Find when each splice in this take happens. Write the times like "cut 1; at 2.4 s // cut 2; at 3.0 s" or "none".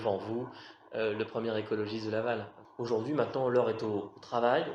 cut 1; at 2.6 s